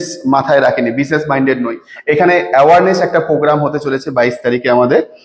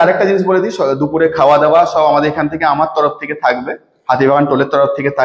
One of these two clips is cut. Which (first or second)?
first